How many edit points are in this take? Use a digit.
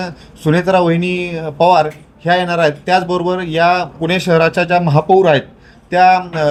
0